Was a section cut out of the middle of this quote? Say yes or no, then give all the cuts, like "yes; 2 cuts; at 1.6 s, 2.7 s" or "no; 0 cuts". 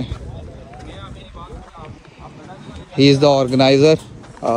no; 0 cuts